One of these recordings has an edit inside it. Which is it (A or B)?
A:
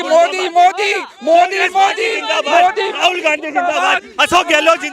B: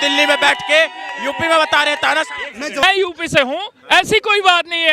B